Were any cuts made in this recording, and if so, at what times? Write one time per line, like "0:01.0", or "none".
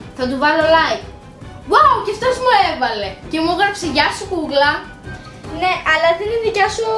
none